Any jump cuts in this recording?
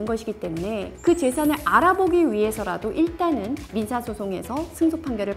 yes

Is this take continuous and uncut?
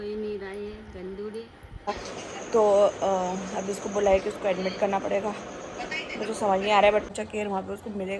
no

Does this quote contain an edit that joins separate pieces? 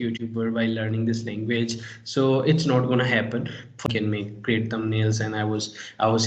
yes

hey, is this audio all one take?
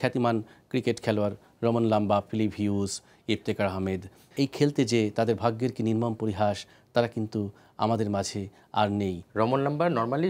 no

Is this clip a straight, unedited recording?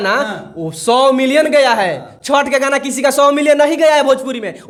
yes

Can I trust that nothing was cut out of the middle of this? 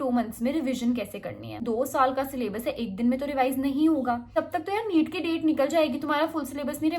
no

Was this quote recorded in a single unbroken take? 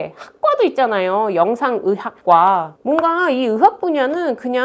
no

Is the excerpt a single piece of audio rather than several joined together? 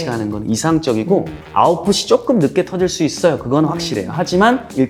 yes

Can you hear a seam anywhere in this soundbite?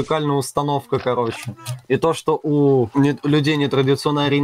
yes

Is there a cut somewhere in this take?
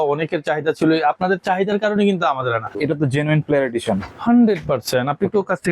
yes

